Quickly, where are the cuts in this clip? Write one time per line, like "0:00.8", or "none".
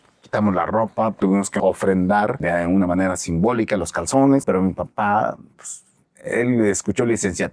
0:01.5
0:02.4
0:04.4

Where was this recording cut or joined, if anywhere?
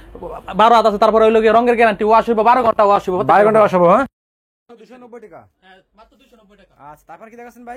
none

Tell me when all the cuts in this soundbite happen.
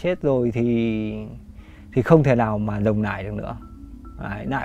none

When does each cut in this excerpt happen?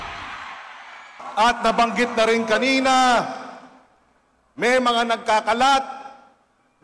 0:01.2

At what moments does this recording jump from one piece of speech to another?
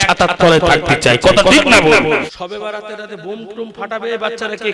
0:02.4

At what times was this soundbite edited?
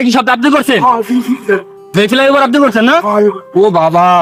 none

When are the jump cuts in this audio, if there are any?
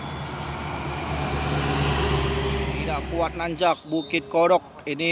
0:03.0

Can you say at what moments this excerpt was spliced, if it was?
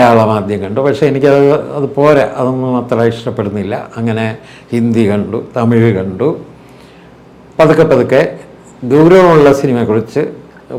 none

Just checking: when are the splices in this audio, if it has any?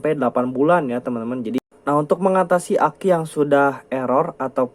0:01.6

